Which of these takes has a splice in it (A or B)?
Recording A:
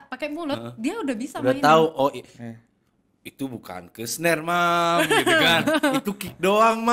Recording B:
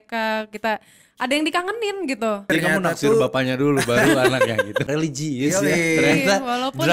B